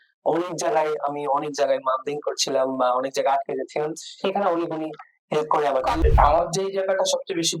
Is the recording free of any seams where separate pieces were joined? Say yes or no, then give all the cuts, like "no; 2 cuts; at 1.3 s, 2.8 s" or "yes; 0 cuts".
no; 1 cut; at 6.0 s